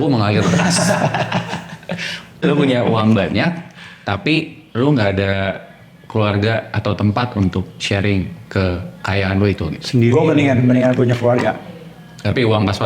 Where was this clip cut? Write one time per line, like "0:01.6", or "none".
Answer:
0:02.4